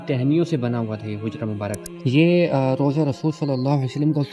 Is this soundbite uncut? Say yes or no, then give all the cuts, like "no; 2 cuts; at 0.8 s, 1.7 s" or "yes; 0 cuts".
no; 1 cut; at 1.9 s